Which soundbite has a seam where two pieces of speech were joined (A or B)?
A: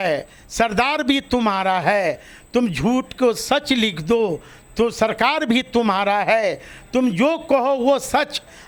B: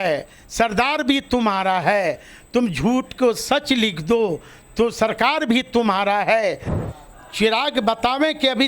B